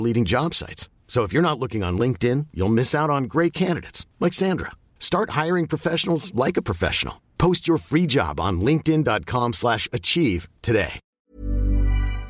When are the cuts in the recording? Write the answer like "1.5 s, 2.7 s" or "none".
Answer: 11.3 s

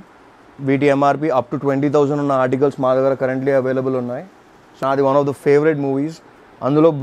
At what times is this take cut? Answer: 4.7 s

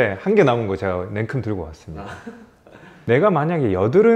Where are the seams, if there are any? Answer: 3.0 s

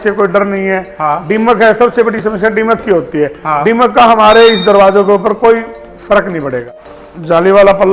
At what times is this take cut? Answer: 6.7 s

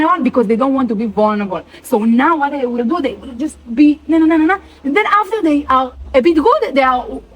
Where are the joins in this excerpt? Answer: 6.0 s

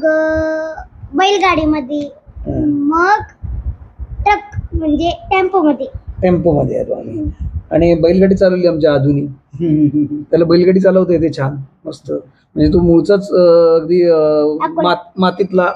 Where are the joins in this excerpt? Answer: none

